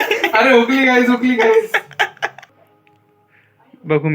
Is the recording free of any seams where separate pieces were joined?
no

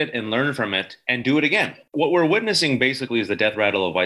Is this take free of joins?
no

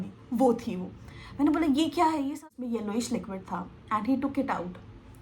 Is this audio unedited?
no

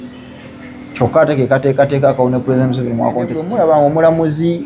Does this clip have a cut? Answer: yes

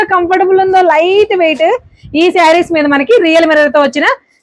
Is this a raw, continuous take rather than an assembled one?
yes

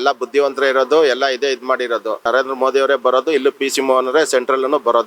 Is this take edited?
yes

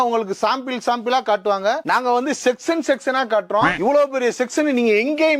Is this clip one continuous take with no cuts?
yes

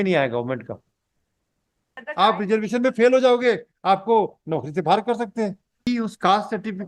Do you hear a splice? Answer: yes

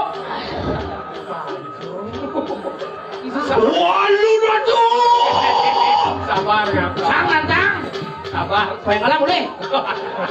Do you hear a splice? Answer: no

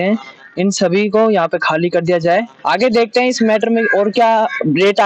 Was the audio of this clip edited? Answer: no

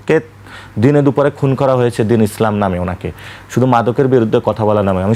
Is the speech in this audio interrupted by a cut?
no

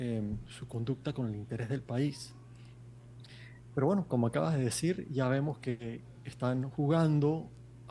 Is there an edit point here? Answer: no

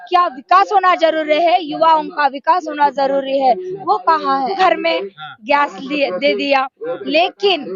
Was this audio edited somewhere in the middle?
yes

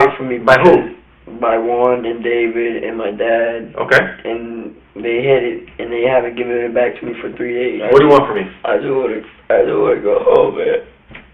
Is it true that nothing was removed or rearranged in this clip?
no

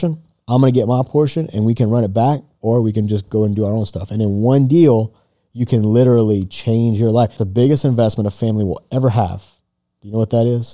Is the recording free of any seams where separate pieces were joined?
no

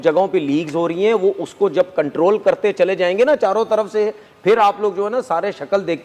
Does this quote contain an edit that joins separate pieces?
no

